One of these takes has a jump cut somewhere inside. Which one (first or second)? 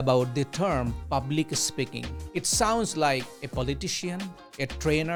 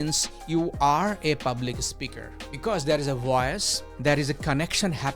second